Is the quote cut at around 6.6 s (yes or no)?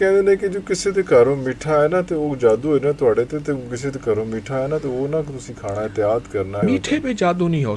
yes